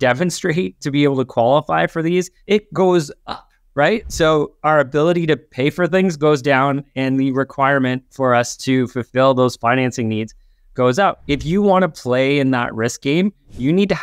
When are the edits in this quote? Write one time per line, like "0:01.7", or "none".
0:02.3
0:11.2